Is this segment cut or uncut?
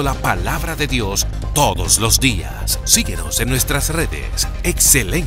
uncut